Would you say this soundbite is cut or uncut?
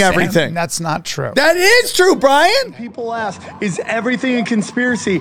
cut